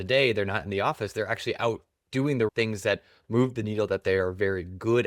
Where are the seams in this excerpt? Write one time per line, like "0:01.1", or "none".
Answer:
0:02.5